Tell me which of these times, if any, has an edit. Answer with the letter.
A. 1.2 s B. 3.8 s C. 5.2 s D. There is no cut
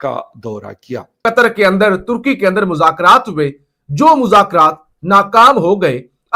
A